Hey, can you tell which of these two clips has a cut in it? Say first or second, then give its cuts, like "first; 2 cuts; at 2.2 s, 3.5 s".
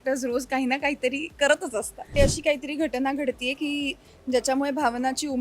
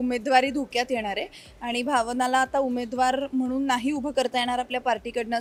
first; 1 cut; at 2.0 s